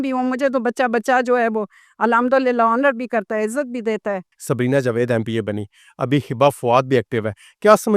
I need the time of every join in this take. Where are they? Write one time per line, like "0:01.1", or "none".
0:04.3